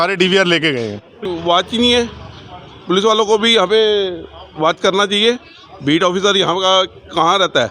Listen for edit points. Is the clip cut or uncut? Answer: cut